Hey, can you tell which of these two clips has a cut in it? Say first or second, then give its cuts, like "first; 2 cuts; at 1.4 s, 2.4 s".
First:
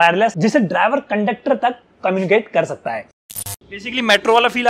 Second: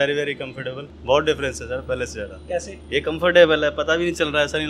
first; 1 cut; at 3.1 s